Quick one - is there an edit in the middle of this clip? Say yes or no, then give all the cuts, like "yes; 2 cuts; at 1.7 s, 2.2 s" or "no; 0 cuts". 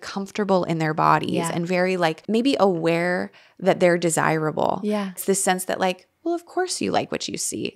yes; 2 cuts; at 2.2 s, 5.2 s